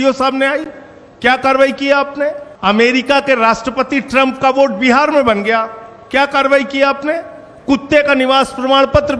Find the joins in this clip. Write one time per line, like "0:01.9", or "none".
0:02.5